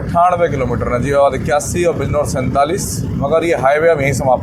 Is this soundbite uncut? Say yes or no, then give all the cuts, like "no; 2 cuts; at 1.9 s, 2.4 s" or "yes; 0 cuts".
yes; 0 cuts